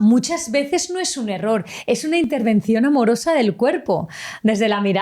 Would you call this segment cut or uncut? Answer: uncut